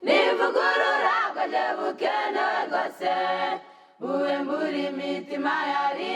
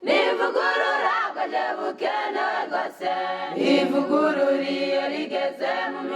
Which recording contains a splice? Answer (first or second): first